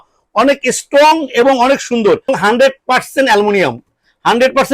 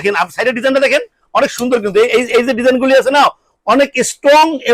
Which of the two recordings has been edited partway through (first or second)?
first